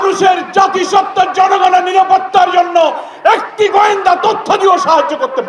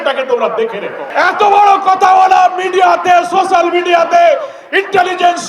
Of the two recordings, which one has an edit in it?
second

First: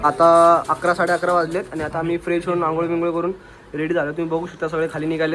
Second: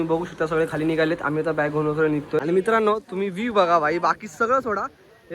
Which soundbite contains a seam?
second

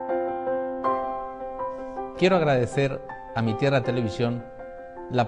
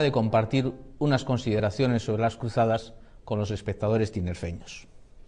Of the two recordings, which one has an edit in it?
second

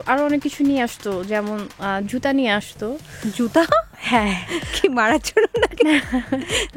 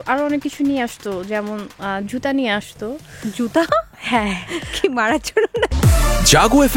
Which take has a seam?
second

